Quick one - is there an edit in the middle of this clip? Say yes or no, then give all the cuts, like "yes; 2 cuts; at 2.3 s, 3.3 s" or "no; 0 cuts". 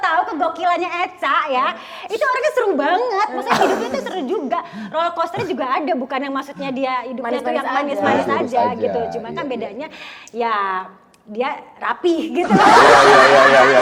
no; 0 cuts